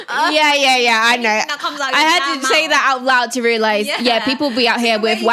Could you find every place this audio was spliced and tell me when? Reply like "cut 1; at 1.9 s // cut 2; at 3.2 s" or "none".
none